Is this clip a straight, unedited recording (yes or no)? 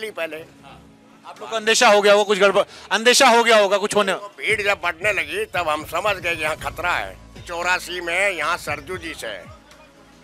no